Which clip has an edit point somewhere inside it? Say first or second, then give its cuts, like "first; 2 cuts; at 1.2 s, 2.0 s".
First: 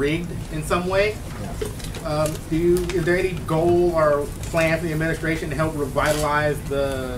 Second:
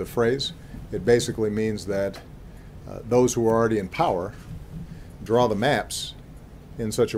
first; 1 cut; at 3.3 s